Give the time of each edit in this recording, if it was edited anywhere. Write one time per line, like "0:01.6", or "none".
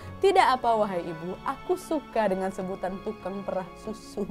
none